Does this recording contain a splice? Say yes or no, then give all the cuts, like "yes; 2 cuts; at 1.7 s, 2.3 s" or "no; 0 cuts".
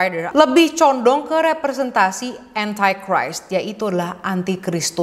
no; 0 cuts